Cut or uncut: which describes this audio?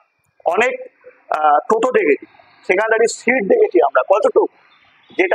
uncut